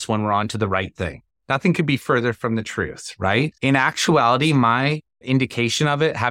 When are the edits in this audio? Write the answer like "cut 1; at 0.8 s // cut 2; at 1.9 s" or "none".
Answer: cut 1; at 1.2 s // cut 2; at 3.5 s // cut 3; at 5.1 s

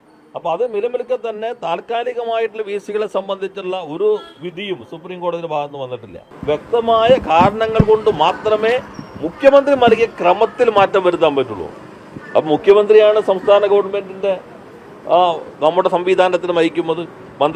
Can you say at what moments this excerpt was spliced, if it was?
cut 1; at 6.3 s

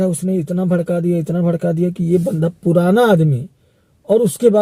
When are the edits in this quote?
none

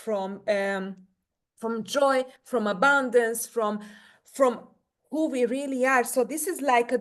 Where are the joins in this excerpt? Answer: none

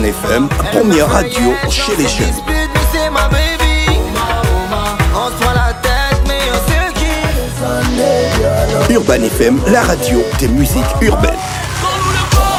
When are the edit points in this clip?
none

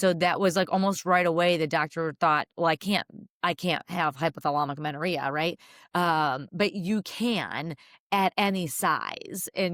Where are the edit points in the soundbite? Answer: none

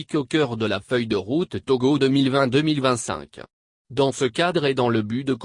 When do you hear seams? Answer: cut 1; at 2.3 s

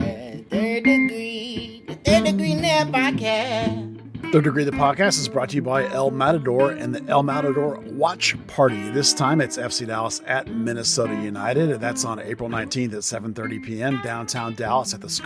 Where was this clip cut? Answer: cut 1; at 3.9 s

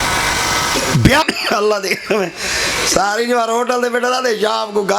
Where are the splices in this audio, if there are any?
cut 1; at 1.2 s

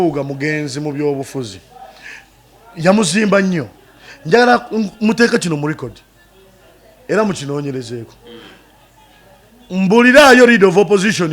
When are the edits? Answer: none

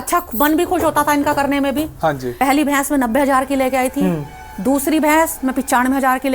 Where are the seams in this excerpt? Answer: cut 1; at 2.3 s

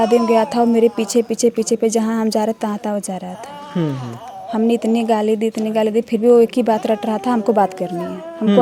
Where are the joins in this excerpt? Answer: none

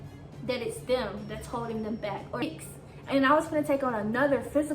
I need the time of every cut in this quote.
cut 1; at 2.4 s

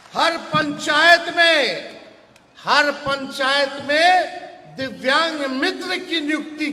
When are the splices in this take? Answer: none

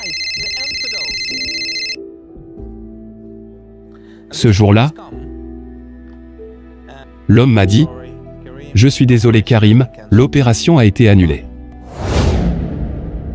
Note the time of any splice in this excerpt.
none

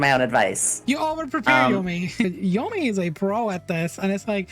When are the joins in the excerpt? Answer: cut 1; at 2.2 s

